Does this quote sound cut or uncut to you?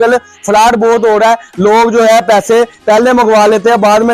uncut